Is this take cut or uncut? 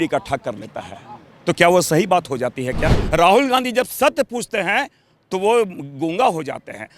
cut